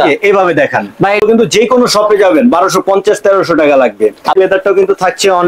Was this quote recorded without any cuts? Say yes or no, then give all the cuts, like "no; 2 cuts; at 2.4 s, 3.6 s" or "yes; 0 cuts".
no; 2 cuts; at 1.2 s, 4.3 s